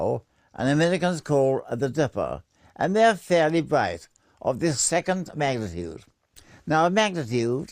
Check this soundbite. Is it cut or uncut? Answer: cut